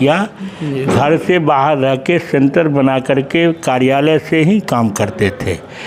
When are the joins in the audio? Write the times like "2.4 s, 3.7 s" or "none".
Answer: none